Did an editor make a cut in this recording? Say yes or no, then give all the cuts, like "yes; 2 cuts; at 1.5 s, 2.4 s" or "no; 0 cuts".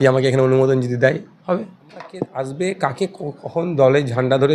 yes; 1 cut; at 2.3 s